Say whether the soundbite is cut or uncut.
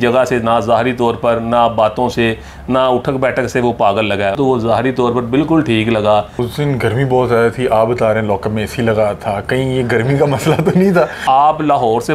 cut